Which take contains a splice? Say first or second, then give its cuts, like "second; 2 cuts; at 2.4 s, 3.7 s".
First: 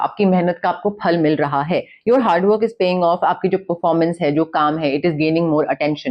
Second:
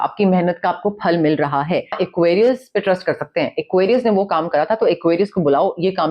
second; 1 cut; at 1.9 s